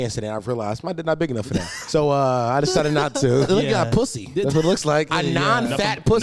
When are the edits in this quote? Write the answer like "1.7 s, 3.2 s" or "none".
1.8 s, 3.5 s, 5.1 s